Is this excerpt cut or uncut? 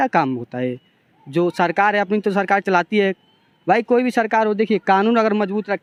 uncut